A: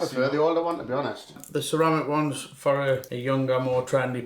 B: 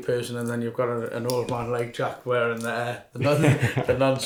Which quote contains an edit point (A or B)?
A